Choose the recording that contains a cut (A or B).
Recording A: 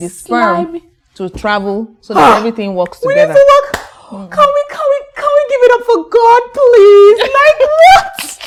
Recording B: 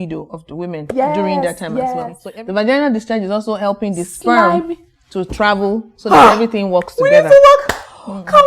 B